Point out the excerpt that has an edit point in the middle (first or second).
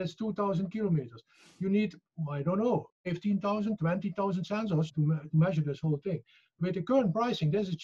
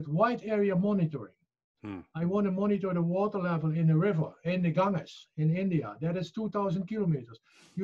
first